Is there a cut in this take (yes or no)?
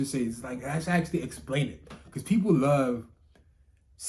no